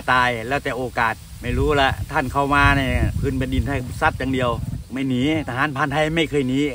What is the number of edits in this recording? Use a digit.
3